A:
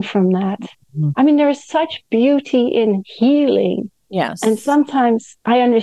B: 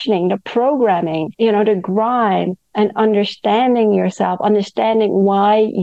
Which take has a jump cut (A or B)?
B